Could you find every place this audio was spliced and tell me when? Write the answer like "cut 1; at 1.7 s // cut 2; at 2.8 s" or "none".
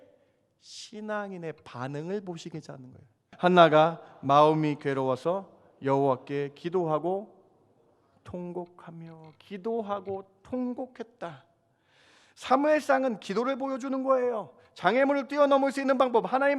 cut 1; at 3.2 s